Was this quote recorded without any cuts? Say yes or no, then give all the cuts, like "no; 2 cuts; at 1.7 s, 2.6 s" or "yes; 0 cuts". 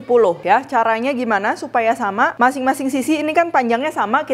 yes; 0 cuts